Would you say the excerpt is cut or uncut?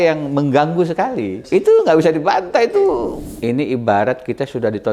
cut